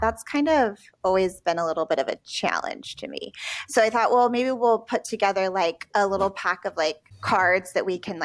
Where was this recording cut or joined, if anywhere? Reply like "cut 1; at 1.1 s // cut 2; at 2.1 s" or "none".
cut 1; at 7.1 s